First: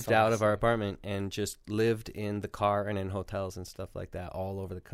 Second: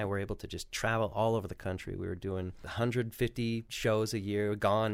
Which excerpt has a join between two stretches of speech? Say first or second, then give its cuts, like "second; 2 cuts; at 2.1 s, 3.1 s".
second; 2 cuts; at 2.6 s, 3.7 s